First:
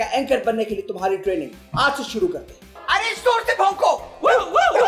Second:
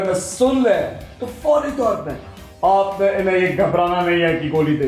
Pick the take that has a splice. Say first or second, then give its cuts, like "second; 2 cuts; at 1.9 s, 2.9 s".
first; 1 cut; at 2.8 s